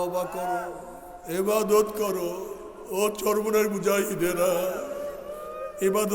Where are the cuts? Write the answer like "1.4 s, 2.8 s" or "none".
none